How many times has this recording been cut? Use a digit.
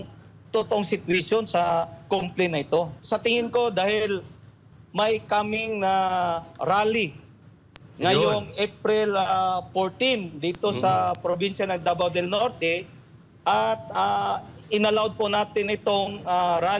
1